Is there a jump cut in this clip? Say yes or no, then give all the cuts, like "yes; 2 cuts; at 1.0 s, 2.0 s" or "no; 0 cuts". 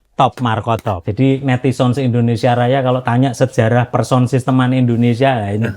yes; 1 cut; at 1.0 s